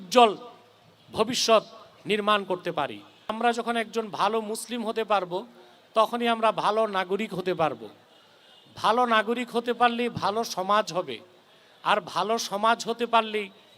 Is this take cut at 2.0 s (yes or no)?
no